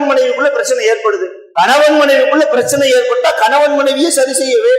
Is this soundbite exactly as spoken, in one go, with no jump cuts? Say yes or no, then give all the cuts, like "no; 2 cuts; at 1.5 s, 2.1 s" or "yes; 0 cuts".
no; 1 cut; at 1.4 s